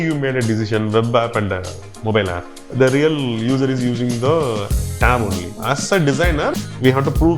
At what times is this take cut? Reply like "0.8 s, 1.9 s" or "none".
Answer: 2.6 s, 5.5 s, 6.5 s